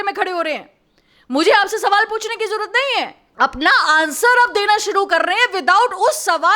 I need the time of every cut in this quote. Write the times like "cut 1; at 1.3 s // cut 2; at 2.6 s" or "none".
cut 1; at 3.2 s